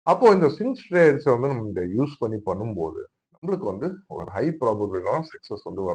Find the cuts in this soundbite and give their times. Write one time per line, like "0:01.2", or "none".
none